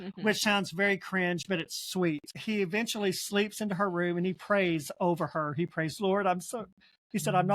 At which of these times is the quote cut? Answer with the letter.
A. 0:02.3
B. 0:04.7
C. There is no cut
A